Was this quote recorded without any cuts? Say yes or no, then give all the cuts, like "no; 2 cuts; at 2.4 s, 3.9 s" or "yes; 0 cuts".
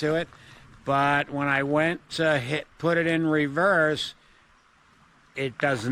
yes; 0 cuts